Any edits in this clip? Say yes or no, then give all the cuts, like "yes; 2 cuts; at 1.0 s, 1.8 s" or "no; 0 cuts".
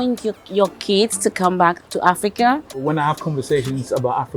yes; 1 cut; at 2.8 s